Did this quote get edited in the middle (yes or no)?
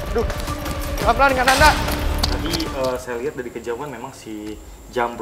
yes